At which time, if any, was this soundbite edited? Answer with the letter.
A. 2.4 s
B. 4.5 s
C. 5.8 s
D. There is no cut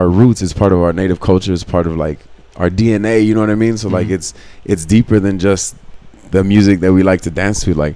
D